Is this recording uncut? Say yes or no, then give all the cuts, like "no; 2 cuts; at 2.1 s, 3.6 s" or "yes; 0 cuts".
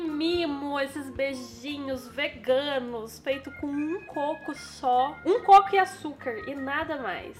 yes; 0 cuts